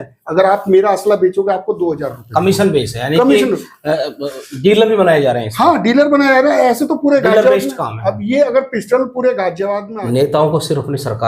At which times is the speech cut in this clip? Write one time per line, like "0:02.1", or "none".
0:09.8